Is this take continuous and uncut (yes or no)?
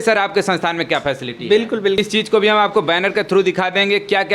no